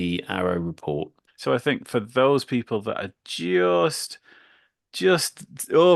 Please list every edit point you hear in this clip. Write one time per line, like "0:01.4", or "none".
0:01.2